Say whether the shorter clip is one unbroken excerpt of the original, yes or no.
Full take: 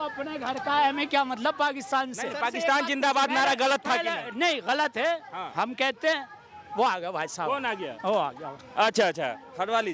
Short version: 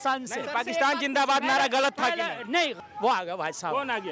no